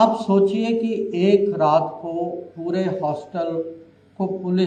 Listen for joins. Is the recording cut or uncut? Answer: uncut